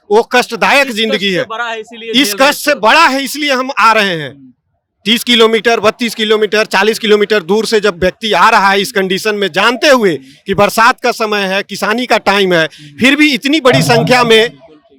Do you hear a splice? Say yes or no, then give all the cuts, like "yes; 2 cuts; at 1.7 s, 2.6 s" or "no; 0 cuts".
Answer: no; 0 cuts